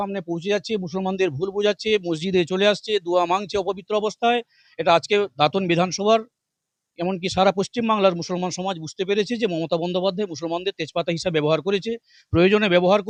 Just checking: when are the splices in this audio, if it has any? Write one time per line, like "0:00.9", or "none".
none